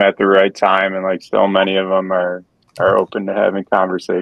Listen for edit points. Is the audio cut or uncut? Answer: uncut